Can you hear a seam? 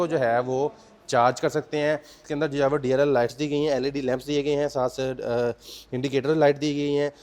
yes; 1 cut; at 2.2 s

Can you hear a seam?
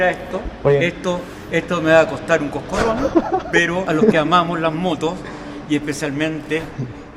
yes; 1 cut; at 3.8 s

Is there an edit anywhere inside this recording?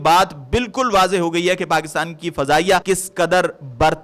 yes; 1 cut; at 2.8 s

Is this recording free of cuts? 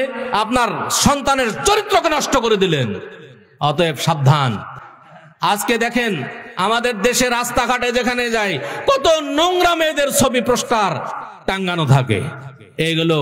yes; 0 cuts

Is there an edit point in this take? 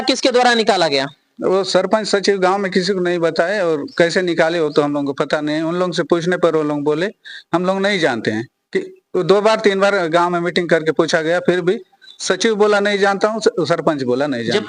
no; 0 cuts

